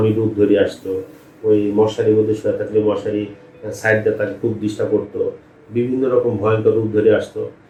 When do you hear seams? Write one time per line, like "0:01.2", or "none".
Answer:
none